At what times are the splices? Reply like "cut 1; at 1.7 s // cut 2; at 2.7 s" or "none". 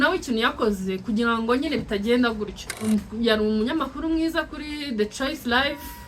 cut 1; at 2.9 s

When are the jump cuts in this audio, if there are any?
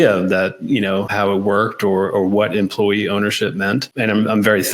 cut 1; at 1.1 s // cut 2; at 3.9 s

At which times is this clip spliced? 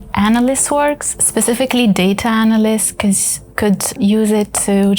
cut 1; at 1.1 s // cut 2; at 4.0 s

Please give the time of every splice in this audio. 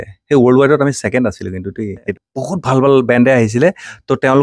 cut 1; at 2.1 s

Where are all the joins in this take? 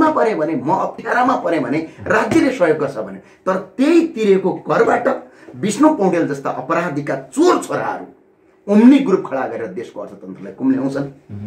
none

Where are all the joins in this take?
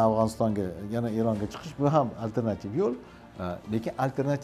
none

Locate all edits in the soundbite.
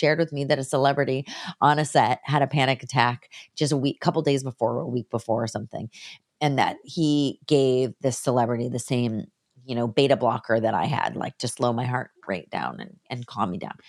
none

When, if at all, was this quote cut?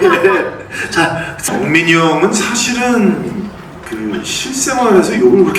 cut 1; at 1.5 s

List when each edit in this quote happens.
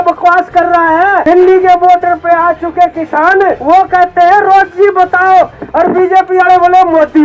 cut 1; at 1.2 s // cut 2; at 3.6 s

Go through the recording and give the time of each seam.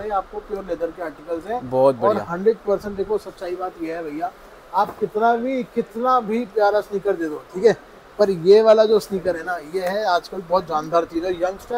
none

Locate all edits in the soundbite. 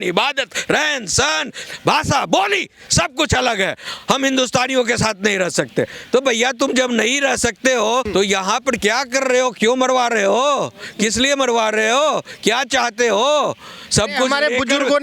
cut 1; at 8.1 s

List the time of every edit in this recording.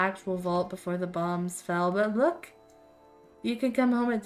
none

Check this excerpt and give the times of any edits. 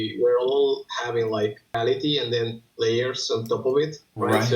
cut 1; at 1.8 s

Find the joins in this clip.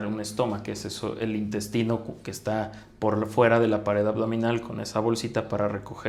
none

